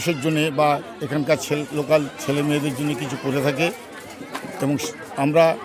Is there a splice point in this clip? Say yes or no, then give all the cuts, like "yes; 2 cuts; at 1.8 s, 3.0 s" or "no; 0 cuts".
no; 0 cuts